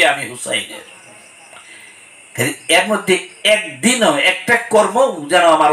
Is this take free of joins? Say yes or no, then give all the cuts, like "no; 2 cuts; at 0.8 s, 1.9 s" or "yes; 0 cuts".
yes; 0 cuts